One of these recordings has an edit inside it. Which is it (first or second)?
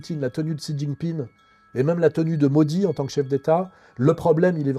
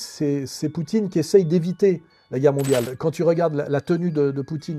second